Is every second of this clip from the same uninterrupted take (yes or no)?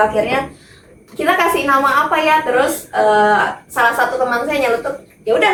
yes